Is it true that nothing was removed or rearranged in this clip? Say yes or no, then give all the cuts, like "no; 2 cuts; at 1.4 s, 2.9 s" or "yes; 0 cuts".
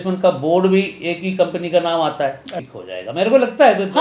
no; 1 cut; at 2.5 s